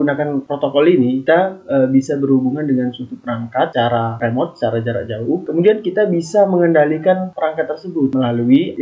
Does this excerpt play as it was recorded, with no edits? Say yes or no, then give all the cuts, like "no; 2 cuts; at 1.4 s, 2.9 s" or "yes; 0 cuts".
yes; 0 cuts